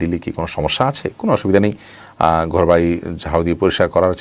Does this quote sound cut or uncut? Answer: uncut